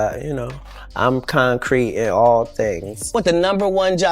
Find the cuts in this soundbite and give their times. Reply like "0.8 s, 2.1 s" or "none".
3.0 s